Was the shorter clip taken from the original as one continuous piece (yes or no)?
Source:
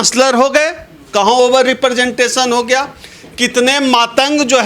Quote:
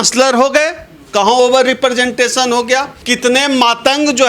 no